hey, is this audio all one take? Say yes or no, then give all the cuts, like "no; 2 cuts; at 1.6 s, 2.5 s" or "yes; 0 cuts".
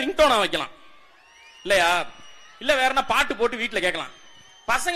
yes; 0 cuts